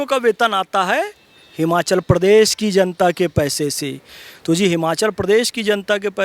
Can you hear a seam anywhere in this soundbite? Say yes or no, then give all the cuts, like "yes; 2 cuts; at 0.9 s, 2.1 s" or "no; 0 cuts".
no; 0 cuts